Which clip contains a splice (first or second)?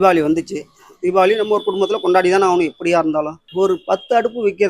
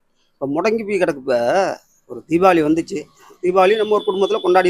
first